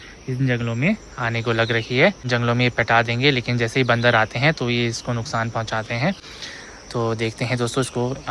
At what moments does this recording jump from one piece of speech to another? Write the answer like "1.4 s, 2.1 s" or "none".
none